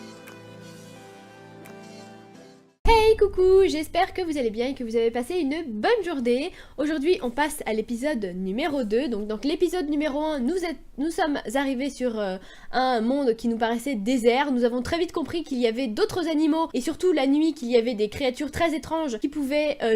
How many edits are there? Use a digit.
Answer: 0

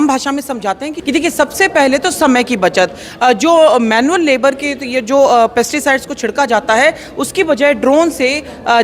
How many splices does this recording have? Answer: 1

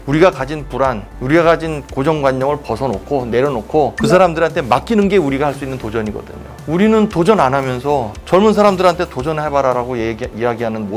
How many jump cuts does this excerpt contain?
0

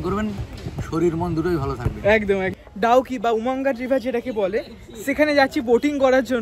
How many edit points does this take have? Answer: 1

